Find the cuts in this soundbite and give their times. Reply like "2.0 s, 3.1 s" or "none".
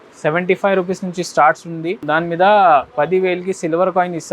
1.9 s